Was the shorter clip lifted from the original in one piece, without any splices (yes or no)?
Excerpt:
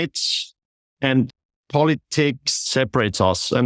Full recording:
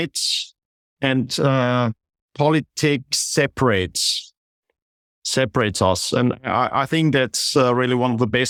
no